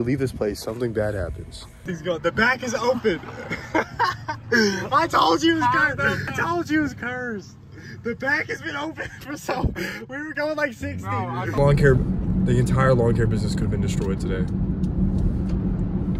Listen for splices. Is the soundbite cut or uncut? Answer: cut